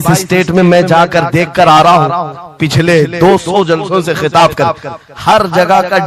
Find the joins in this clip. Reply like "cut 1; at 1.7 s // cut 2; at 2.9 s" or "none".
none